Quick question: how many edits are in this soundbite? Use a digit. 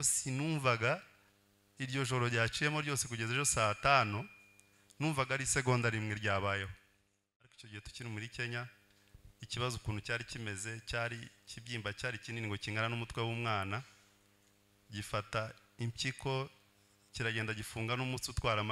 1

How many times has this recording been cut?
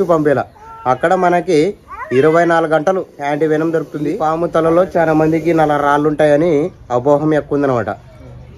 1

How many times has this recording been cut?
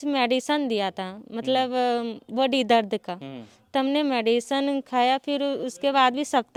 0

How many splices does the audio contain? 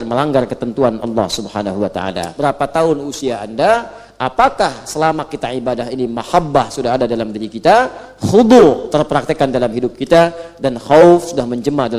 1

